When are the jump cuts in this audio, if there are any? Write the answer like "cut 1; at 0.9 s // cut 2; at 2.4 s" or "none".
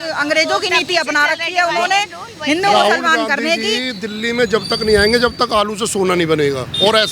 none